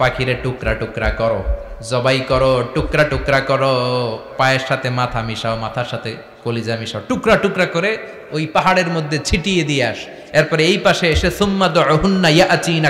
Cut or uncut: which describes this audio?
uncut